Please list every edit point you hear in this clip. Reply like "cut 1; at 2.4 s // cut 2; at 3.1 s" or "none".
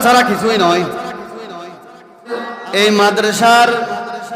cut 1; at 2.5 s